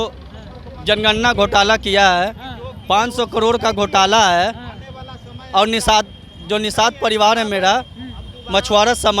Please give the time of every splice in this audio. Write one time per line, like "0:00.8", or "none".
none